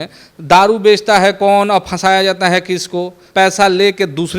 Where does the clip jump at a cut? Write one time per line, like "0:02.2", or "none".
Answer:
0:03.2